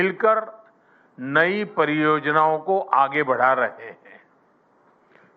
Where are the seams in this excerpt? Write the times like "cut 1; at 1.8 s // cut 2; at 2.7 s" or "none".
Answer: cut 1; at 2.2 s